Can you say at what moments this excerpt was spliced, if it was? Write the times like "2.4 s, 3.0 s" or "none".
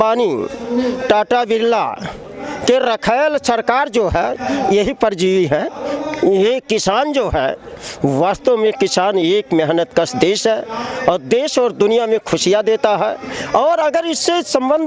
none